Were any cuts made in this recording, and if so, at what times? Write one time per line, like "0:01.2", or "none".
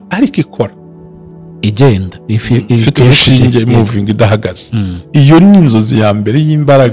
none

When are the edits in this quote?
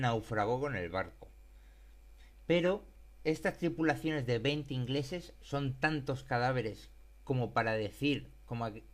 0:07.6

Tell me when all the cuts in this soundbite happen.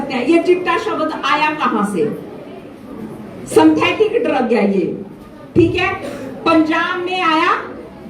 none

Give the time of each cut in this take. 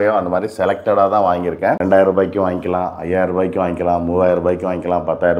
0:01.8

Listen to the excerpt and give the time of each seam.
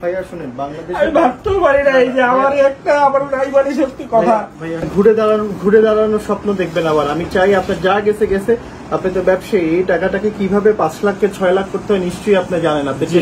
0:04.9

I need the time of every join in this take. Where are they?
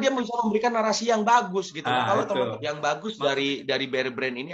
0:02.6

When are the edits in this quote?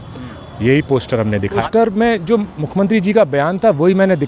0:01.7

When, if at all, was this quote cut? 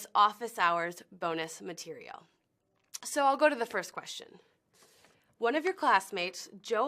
0:05.5

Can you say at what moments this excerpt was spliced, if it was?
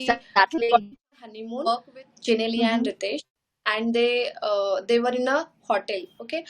0:01.6

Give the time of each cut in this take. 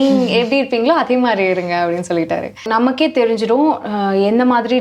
0:02.7

